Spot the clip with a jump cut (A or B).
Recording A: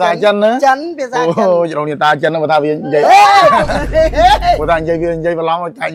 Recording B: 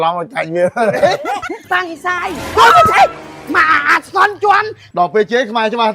B